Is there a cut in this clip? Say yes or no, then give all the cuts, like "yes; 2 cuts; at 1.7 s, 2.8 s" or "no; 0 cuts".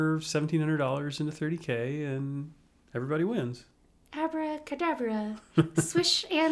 no; 0 cuts